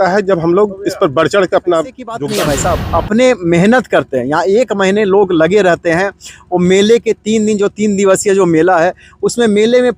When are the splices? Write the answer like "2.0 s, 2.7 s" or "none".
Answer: 2.2 s